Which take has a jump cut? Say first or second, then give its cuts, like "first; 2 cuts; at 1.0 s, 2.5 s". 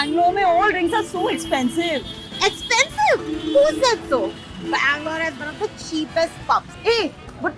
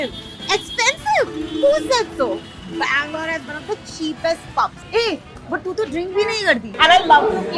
second; 1 cut; at 6.7 s